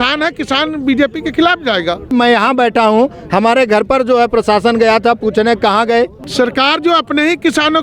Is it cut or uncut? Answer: cut